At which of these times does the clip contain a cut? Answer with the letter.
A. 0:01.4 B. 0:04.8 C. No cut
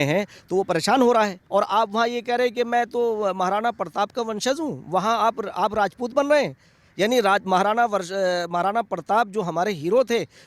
A